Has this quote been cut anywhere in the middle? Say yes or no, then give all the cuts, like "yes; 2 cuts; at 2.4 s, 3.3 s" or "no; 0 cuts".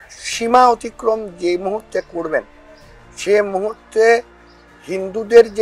no; 0 cuts